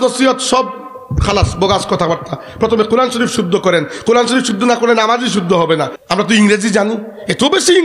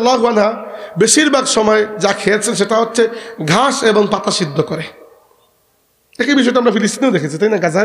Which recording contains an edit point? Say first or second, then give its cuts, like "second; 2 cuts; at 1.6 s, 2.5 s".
first; 1 cut; at 6.0 s